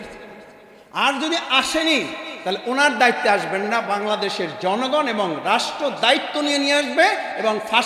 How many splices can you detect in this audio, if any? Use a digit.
0